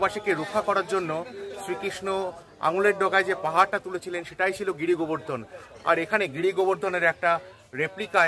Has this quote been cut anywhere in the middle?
no; 0 cuts

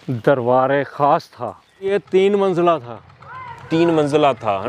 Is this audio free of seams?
no; 1 cut; at 1.9 s

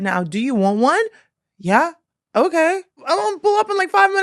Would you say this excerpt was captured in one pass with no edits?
no; 1 cut; at 3.0 s

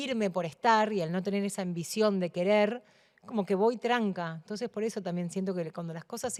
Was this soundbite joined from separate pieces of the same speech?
no; 0 cuts

